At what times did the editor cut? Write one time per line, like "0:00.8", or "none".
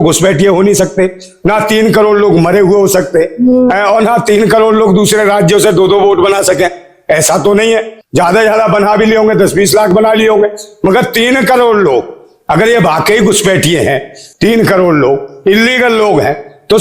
none

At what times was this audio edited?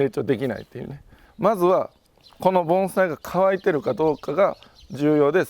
0:01.2

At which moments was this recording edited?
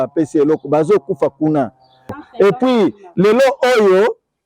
0:02.1

